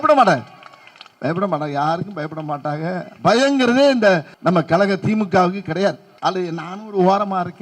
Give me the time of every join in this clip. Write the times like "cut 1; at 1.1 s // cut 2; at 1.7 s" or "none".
cut 1; at 4.3 s // cut 2; at 6.1 s